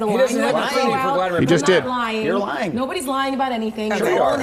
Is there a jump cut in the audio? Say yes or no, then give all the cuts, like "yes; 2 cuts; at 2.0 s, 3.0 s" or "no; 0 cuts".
no; 0 cuts